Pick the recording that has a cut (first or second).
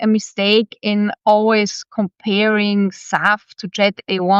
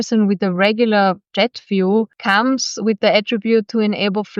second